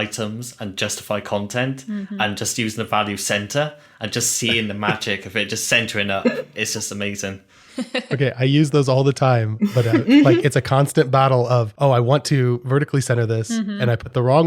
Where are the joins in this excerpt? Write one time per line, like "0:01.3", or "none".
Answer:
0:11.7